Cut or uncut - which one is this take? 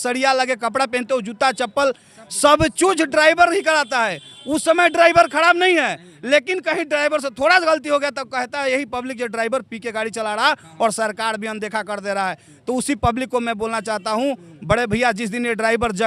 uncut